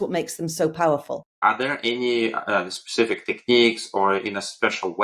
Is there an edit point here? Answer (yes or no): yes